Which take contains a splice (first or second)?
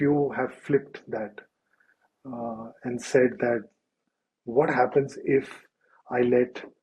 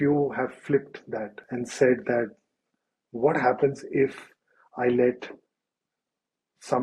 second